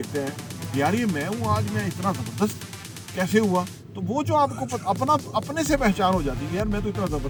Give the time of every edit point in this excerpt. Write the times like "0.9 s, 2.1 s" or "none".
none